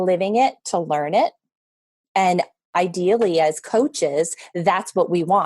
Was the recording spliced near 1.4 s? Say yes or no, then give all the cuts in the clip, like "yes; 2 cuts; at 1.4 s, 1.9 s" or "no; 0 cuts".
no; 1 cut; at 2.7 s